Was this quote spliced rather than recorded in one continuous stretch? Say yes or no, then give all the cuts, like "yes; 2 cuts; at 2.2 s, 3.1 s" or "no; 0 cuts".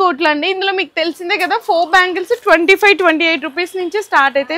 no; 0 cuts